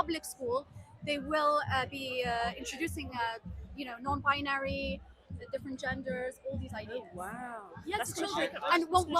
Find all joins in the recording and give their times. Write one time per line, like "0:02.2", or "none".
none